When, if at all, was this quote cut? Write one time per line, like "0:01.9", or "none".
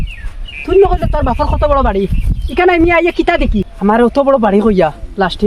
0:03.7